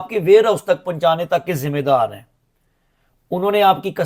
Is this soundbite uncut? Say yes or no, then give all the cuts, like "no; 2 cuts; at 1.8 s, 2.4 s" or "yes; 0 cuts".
yes; 0 cuts